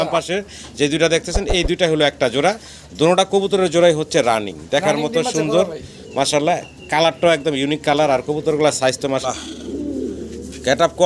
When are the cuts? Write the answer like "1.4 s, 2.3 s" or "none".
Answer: 9.2 s